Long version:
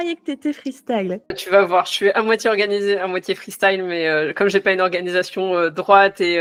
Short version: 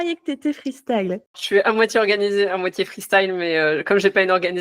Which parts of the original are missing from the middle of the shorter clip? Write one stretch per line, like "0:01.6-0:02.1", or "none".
0:01.4-0:01.9